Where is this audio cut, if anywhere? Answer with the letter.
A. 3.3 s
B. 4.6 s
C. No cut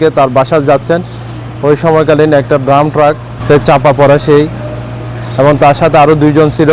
A